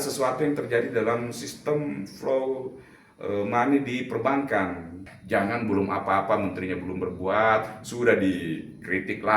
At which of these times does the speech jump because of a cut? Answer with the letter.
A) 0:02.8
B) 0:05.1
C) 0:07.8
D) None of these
B